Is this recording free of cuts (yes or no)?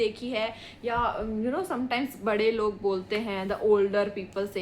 yes